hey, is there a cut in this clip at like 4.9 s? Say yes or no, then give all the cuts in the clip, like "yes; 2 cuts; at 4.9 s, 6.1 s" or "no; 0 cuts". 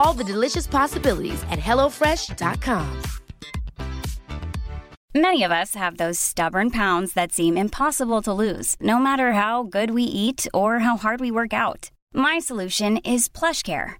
yes; 1 cut; at 4.9 s